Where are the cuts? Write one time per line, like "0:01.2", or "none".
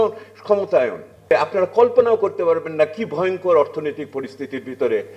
0:01.3